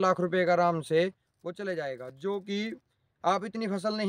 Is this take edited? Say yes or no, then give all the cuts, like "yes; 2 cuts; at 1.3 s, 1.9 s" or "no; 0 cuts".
no; 0 cuts